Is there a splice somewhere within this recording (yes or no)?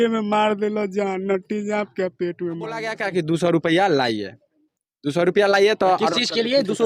yes